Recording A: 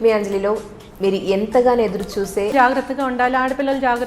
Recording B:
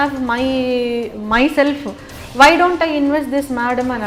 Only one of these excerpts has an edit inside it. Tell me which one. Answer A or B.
A